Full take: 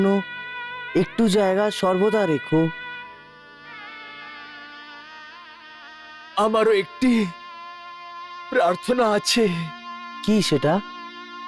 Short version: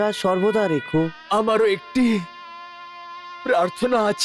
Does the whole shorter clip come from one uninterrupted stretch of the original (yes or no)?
no